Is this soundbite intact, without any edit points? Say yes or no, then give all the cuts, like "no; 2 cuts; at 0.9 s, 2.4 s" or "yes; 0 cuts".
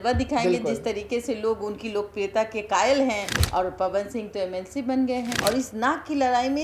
no; 2 cuts; at 3.4 s, 5.3 s